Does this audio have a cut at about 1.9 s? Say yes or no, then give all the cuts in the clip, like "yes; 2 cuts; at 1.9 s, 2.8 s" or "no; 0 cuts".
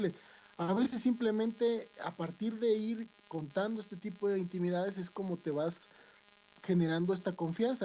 no; 0 cuts